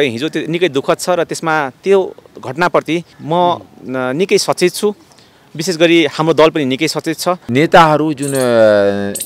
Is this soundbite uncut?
no; 2 cuts; at 3.1 s, 7.4 s

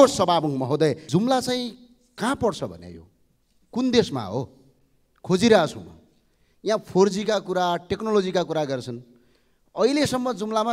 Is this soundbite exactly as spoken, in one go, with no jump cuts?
no; 1 cut; at 1.0 s

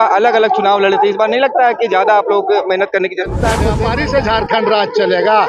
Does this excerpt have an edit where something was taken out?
yes; 1 cut; at 3.7 s

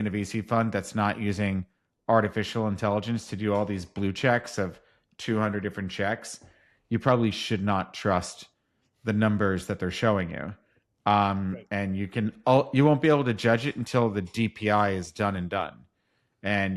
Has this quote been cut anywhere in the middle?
no; 0 cuts

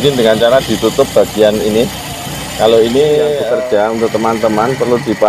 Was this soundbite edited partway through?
yes; 1 cut; at 3.4 s

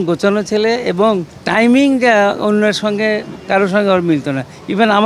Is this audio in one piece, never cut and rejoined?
no; 2 cuts; at 1.4 s, 3.3 s

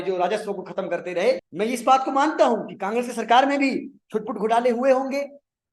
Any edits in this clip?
yes; 1 cut; at 1.5 s

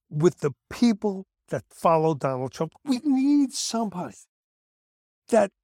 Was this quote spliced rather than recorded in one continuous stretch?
yes; 1 cut; at 2.6 s

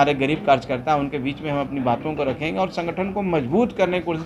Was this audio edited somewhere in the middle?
no; 0 cuts

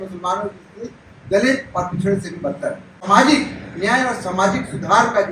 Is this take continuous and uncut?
no; 1 cut; at 3.0 s

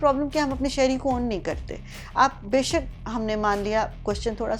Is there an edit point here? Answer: no; 0 cuts

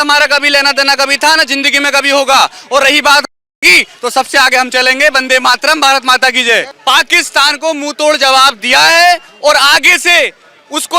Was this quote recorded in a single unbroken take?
no; 1 cut; at 6.7 s

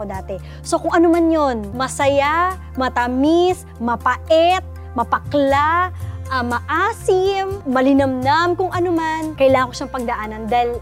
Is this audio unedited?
no; 3 cuts; at 1.8 s, 7.6 s, 9.3 s

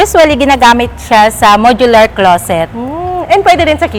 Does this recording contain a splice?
no; 0 cuts

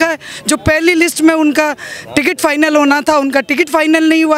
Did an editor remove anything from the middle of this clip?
no; 0 cuts

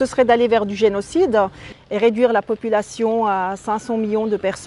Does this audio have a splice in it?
yes; 1 cut; at 1.7 s

